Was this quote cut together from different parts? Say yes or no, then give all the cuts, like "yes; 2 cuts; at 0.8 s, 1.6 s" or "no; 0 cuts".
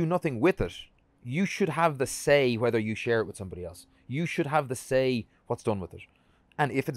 no; 0 cuts